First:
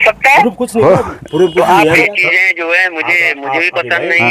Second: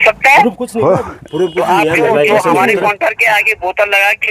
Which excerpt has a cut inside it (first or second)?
first